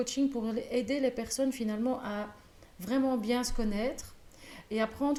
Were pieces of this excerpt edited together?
no; 0 cuts

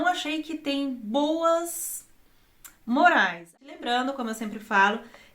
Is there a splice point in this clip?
yes; 1 cut; at 3.5 s

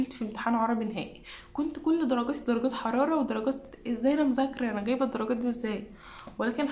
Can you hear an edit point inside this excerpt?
no; 0 cuts

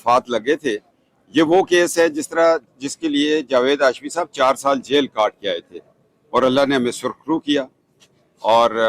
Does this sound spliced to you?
no; 0 cuts

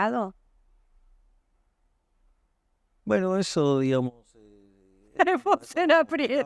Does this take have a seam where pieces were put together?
no; 0 cuts

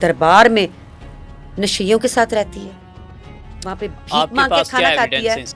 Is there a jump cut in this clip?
no; 0 cuts

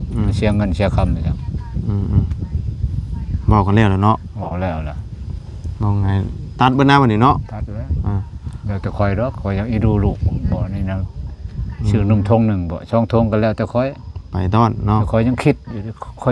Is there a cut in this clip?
no; 0 cuts

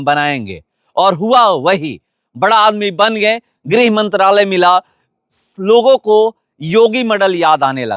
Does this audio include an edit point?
yes; 1 cut; at 3.5 s

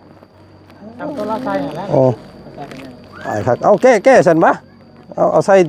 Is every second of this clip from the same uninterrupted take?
yes; 0 cuts

